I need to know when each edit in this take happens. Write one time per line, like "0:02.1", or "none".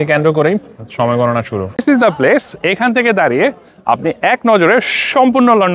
0:01.7